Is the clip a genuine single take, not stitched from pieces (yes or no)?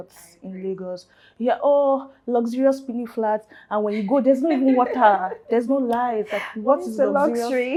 yes